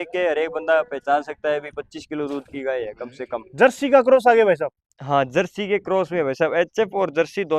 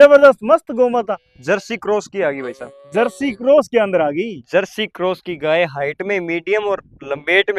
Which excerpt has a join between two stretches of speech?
first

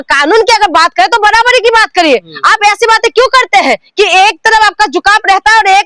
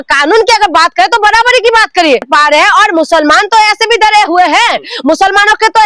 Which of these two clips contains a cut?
second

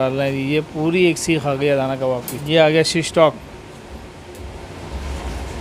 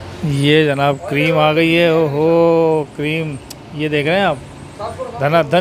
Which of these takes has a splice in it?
first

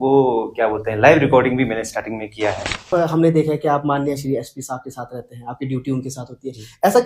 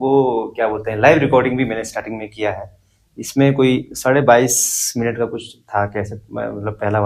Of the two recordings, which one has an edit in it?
first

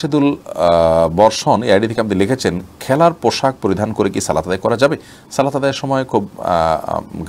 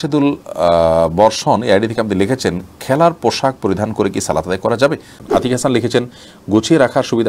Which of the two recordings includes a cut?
second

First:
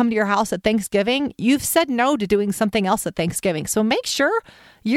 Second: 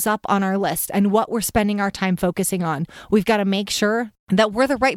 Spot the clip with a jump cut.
second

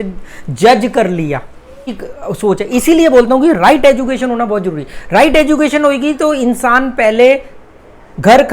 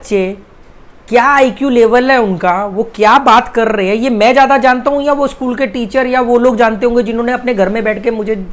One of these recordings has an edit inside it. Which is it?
first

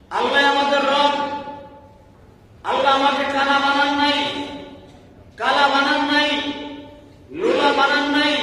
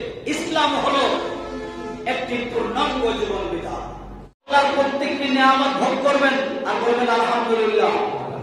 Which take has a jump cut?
second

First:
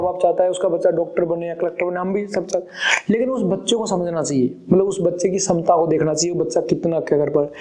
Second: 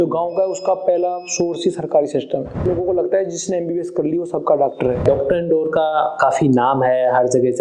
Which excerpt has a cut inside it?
second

